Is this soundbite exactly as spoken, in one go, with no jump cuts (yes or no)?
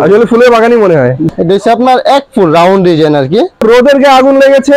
no